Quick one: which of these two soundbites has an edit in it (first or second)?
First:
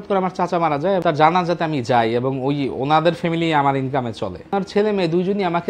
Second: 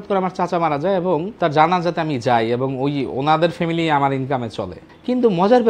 first